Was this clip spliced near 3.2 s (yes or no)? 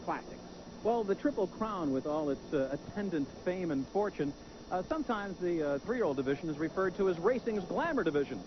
yes